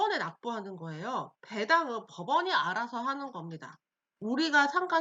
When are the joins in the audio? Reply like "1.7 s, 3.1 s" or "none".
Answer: 1.4 s